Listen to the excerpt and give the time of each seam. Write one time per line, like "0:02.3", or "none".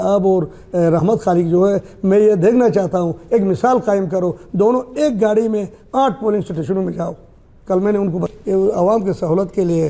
0:08.3